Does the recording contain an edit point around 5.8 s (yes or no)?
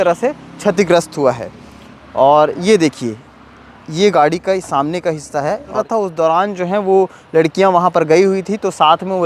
yes